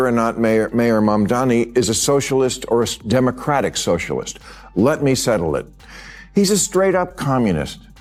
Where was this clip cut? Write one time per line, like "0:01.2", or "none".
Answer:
none

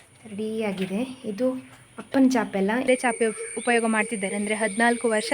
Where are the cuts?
0:02.9

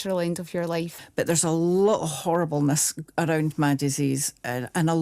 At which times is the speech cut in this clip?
0:01.0

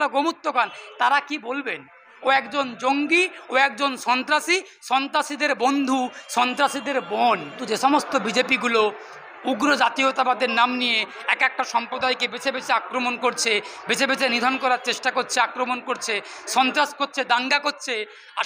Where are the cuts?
0:02.1
0:07.6

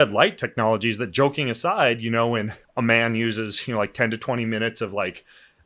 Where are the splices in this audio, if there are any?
0:02.6

